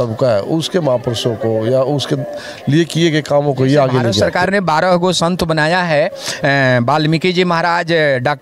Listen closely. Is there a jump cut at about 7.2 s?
no; 1 cut; at 4.2 s

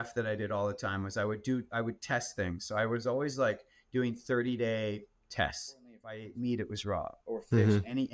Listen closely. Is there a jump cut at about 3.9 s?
no; 1 cut; at 6.2 s

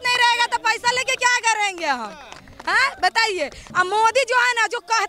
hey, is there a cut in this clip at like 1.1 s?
no; 1 cut; at 3.7 s

